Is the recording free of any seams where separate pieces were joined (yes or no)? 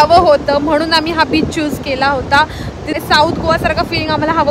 no